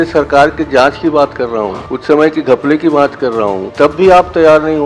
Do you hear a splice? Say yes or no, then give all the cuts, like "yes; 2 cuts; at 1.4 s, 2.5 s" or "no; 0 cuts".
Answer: yes; 2 cuts; at 1.9 s, 3.6 s